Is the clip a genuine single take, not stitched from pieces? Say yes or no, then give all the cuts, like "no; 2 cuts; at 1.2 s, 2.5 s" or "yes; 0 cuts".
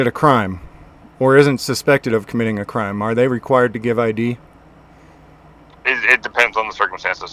yes; 0 cuts